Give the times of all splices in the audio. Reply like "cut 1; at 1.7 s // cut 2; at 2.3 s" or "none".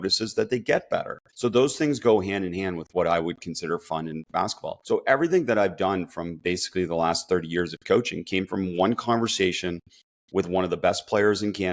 cut 1; at 1.2 s // cut 2; at 4.7 s